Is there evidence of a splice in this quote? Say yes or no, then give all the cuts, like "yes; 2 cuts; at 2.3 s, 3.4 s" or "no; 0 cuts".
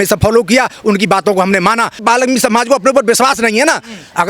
yes; 1 cut; at 2.0 s